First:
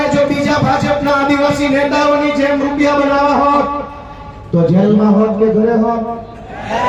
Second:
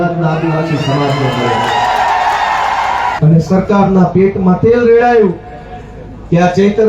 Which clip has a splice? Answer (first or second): second